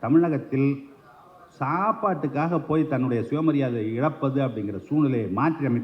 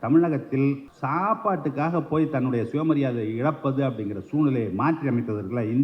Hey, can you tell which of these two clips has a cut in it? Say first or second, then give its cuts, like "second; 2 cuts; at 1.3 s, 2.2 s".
second; 1 cut; at 0.9 s